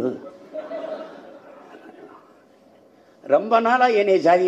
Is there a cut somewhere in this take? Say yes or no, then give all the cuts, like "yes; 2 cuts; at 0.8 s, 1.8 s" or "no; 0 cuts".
no; 0 cuts